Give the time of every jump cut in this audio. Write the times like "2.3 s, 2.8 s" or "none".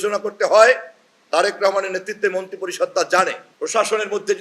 3.5 s